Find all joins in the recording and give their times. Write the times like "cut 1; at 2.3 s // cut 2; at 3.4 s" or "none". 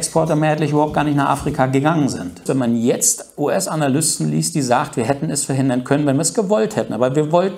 cut 1; at 2.4 s